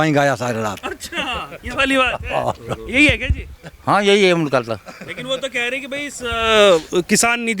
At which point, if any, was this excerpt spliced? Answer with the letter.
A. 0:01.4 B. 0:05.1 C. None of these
C